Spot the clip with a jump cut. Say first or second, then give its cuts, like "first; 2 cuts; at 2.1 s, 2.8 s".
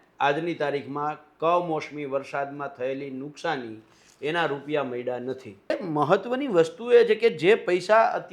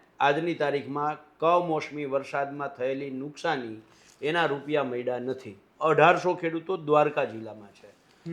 first; 1 cut; at 5.7 s